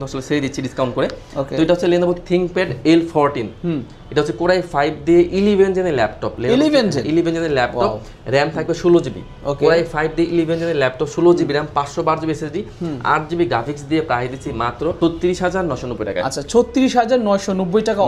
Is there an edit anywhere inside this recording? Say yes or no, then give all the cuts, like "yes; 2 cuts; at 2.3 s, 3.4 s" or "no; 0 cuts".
no; 0 cuts